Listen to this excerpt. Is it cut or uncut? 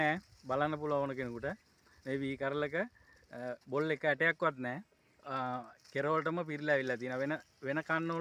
uncut